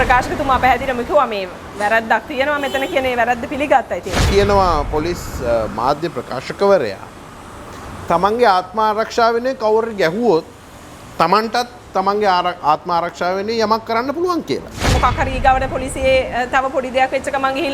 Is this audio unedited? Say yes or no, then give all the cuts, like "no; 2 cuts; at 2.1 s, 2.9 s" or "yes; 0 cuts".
no; 2 cuts; at 4.2 s, 14.9 s